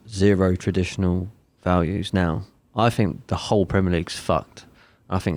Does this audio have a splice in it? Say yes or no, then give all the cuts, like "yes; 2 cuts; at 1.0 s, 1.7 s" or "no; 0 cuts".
no; 0 cuts